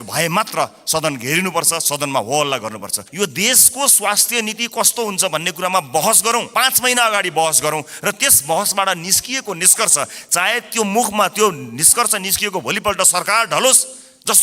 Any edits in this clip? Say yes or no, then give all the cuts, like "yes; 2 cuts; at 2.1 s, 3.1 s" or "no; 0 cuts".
yes; 2 cuts; at 3.0 s, 6.5 s